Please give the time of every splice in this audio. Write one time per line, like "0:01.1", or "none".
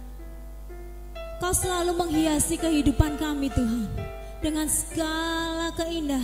none